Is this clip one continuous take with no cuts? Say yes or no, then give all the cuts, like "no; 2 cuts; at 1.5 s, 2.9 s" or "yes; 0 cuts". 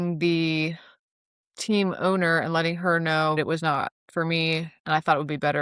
no; 1 cut; at 3.4 s